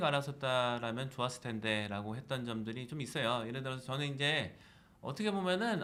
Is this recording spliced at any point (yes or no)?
no